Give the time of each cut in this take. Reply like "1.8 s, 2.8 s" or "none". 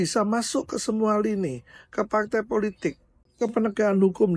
none